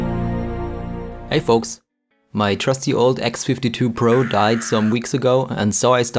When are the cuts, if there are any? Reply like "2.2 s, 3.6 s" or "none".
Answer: 1.2 s